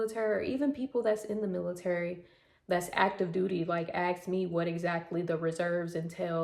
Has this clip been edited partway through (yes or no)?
no